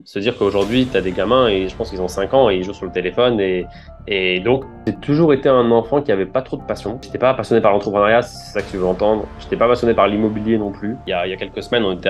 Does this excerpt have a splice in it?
yes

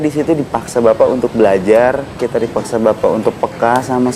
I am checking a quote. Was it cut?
yes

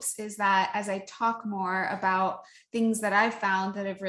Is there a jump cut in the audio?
no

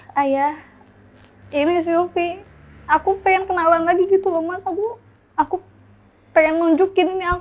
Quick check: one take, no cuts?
yes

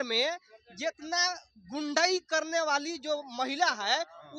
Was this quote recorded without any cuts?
yes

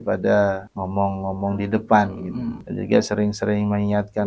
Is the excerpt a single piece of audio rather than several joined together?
yes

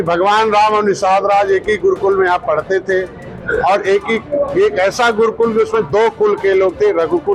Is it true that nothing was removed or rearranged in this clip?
yes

